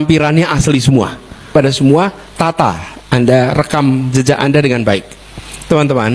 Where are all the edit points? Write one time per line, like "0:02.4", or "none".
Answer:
0:01.5

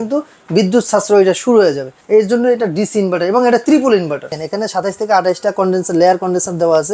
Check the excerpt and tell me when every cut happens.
0:01.9
0:04.4

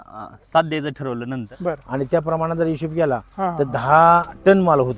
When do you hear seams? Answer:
0:01.4

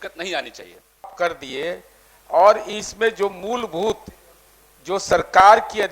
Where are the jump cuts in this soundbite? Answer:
0:01.1

